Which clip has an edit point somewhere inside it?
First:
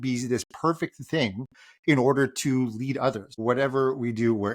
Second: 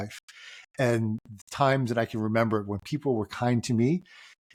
first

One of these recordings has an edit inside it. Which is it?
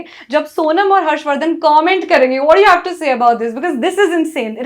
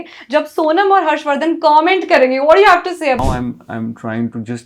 second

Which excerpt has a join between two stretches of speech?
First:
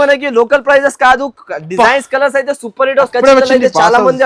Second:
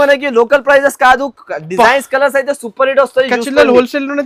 first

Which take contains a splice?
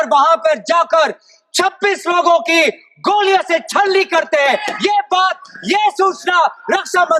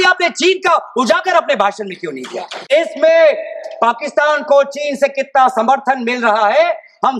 second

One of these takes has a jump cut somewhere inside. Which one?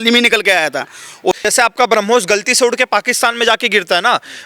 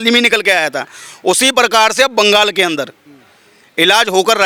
first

